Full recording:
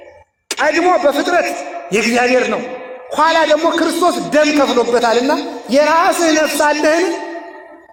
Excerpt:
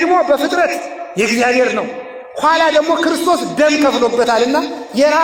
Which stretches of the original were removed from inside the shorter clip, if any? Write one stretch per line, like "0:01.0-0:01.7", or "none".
none